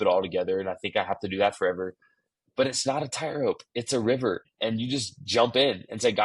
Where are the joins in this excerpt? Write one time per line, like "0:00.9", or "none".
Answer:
0:04.5